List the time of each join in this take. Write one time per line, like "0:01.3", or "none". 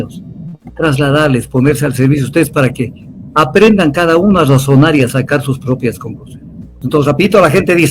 0:06.8